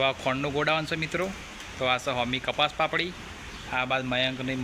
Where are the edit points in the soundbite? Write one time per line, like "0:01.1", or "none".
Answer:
none